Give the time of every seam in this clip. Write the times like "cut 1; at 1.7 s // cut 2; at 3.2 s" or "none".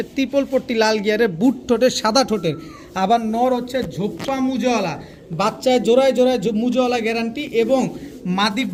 none